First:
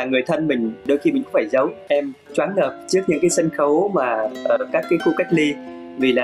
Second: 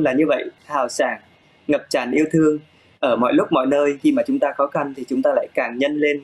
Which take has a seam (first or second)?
first